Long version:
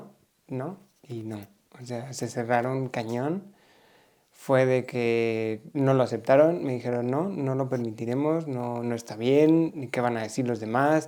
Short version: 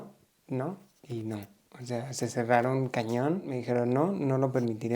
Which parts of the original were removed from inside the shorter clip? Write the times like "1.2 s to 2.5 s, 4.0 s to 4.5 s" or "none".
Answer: 3.5 s to 6.7 s